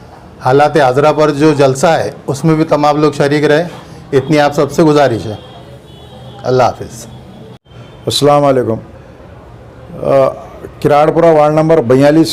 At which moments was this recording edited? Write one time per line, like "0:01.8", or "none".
none